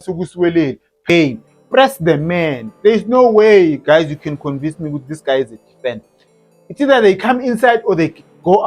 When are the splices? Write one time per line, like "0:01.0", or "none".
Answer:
0:01.1